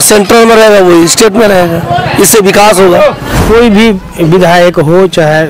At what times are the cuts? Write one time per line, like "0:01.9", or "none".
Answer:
0:03.3